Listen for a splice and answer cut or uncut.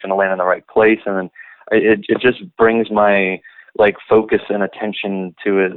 uncut